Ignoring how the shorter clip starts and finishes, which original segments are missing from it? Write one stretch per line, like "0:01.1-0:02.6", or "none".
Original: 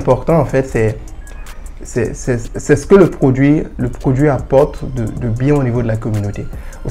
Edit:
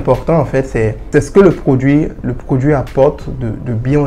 0:01.0-0:02.6